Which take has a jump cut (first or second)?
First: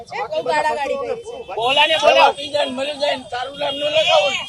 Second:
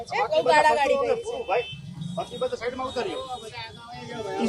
first